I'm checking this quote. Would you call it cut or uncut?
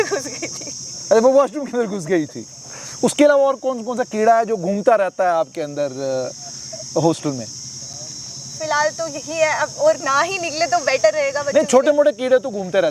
uncut